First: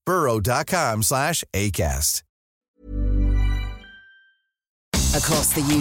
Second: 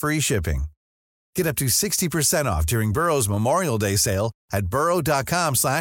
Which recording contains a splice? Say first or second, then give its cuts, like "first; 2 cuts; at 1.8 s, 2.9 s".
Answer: first; 1 cut; at 4.8 s